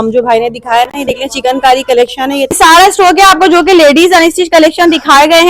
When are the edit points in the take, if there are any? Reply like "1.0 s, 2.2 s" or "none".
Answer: 2.5 s